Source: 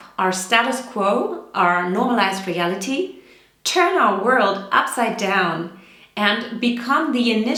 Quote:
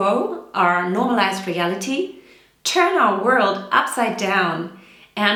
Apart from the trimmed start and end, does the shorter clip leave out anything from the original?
no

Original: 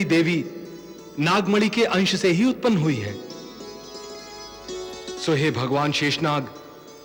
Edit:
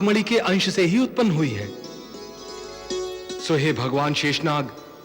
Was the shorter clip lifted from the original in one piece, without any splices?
no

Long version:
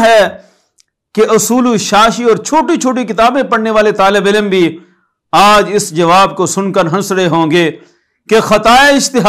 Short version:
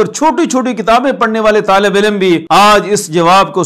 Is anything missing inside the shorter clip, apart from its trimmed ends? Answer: yes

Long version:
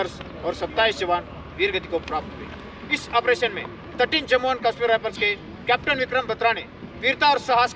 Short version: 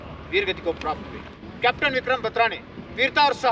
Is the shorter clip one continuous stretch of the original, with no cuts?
no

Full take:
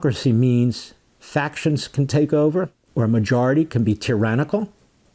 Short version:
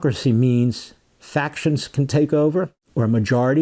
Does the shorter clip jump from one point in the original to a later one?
no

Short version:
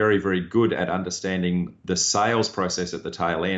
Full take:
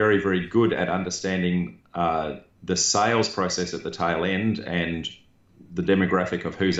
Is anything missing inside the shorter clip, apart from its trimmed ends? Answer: yes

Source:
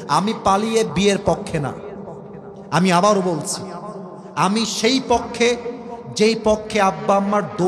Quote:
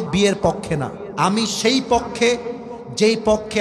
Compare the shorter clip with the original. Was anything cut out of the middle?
yes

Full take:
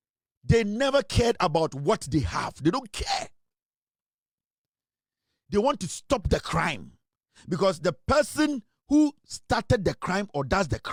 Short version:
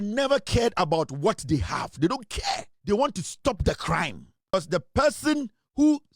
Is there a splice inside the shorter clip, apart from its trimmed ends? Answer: yes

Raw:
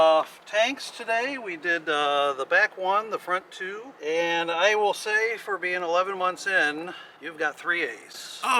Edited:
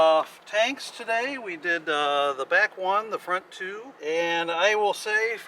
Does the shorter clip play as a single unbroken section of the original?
yes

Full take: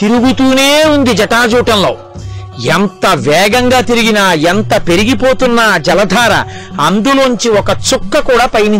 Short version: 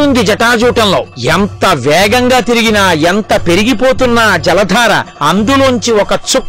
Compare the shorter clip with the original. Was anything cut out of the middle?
yes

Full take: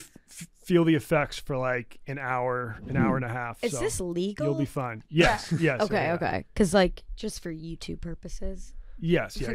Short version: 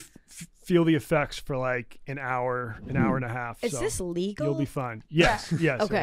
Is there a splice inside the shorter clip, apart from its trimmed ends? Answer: no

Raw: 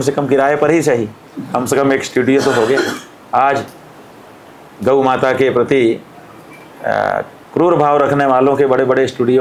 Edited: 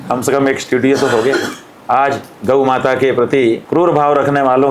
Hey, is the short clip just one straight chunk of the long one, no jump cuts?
no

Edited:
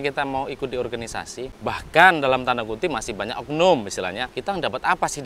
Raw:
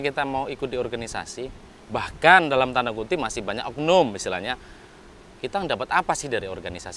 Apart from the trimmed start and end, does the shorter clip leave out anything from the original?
yes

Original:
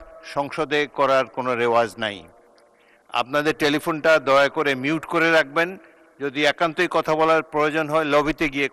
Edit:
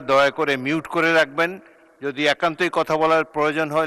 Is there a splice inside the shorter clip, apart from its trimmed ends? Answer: no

